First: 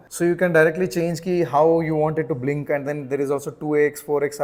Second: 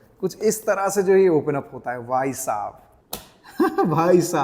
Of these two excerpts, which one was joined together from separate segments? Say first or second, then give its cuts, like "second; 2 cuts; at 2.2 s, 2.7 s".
second; 1 cut; at 2.9 s